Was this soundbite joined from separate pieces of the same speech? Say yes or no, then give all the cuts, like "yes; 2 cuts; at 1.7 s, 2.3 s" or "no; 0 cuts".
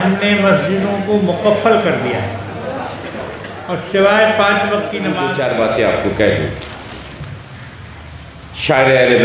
yes; 1 cut; at 5.2 s